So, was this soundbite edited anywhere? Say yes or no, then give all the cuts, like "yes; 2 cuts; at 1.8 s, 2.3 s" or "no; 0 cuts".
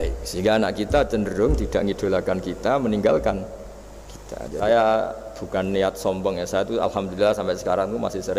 yes; 1 cut; at 4.6 s